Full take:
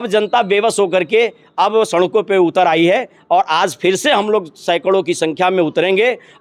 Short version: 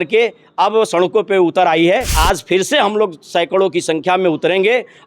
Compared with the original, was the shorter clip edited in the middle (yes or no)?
yes